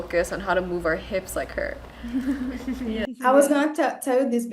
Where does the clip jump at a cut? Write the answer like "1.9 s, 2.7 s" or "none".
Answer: none